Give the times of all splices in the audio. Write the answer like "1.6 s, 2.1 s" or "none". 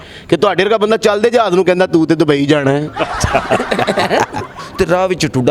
4.6 s